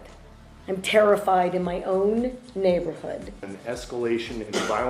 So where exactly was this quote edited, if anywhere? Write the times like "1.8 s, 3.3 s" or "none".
3.5 s